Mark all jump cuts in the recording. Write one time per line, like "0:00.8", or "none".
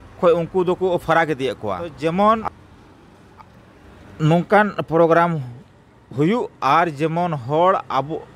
0:01.9